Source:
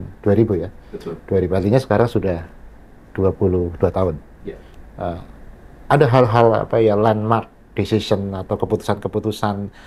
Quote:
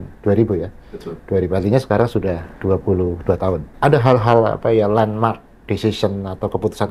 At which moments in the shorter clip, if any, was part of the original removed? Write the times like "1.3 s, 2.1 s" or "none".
2.5 s, 3.7 s